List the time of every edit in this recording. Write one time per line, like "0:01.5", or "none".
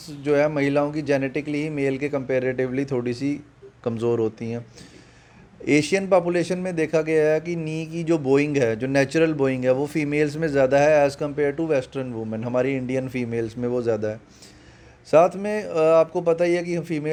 none